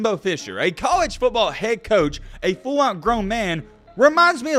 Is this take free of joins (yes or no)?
yes